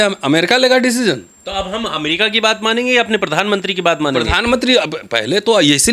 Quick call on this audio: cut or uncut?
cut